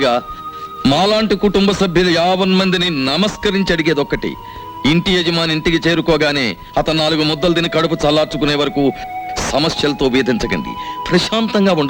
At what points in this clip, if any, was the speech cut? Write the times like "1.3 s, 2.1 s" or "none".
none